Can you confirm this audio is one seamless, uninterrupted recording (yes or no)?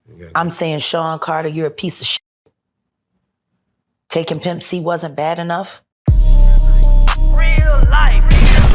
no